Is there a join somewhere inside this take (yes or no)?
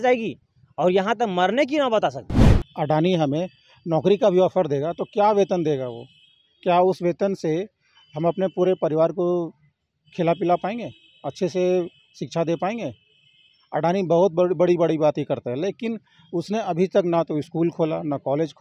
yes